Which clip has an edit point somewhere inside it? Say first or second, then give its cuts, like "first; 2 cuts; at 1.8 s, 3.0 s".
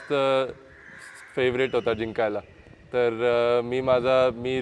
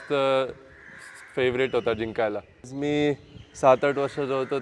second; 1 cut; at 2.7 s